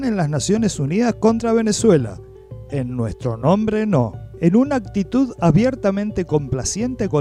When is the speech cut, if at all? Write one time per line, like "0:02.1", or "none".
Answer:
none